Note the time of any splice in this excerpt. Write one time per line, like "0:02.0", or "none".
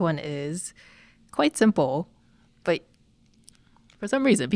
none